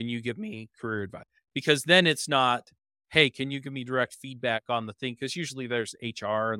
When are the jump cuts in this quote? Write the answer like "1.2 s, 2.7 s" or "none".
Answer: 1.3 s

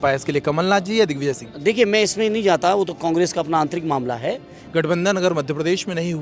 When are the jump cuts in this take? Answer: 4.5 s

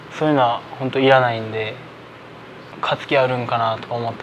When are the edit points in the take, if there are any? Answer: 2.5 s

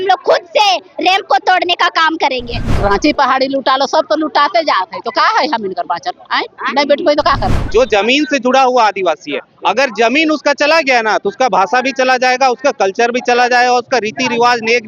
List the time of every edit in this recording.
2.7 s, 7.5 s

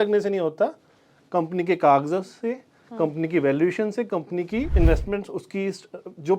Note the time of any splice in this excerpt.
4.7 s

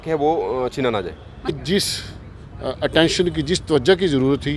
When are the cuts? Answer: 1.5 s

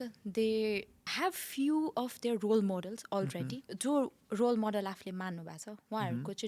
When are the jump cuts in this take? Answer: 1.0 s, 3.6 s

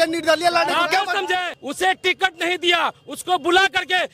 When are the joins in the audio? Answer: 1.6 s

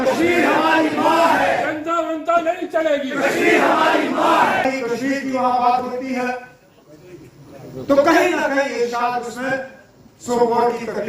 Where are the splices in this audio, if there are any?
4.6 s

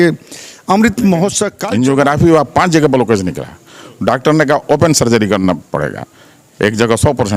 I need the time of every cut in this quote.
1.5 s

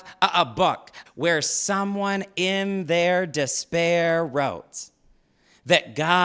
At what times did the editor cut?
0.9 s

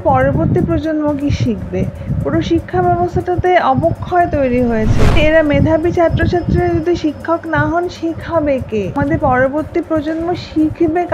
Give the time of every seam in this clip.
5.2 s, 9.0 s

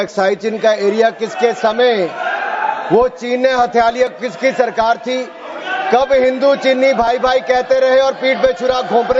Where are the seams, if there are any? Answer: none

